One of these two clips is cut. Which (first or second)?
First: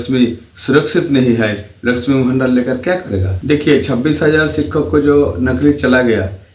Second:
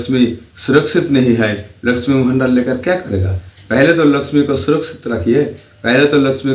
first